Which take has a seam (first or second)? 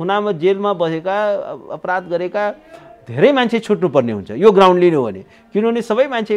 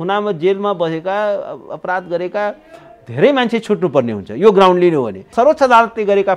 second